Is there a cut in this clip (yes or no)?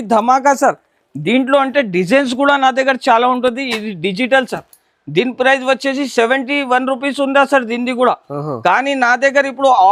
no